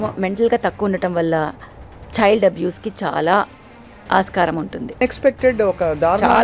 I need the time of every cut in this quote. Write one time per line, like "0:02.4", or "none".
0:05.0